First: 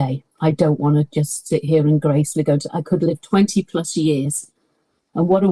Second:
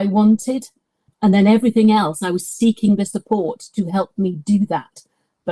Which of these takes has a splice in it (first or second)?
second